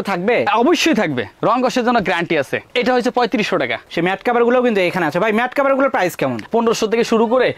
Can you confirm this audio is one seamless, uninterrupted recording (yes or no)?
no